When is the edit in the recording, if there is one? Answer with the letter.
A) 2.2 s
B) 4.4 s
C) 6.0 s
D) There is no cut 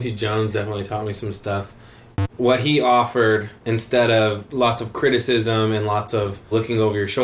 A